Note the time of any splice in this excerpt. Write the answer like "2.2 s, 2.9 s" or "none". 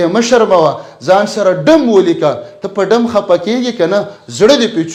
none